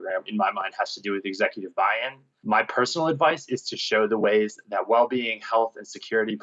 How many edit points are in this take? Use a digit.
1